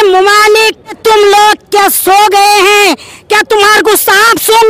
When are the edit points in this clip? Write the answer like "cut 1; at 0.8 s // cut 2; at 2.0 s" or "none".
cut 1; at 1.0 s